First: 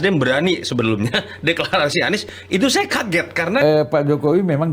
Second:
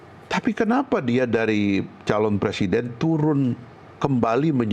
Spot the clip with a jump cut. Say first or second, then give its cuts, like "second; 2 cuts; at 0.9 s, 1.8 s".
first; 1 cut; at 3.6 s